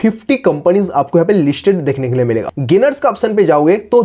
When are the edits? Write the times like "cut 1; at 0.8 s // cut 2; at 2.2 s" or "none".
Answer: cut 1; at 2.5 s